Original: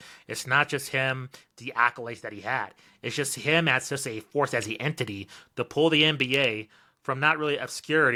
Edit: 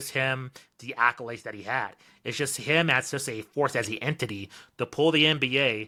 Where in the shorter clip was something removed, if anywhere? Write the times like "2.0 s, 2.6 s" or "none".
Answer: none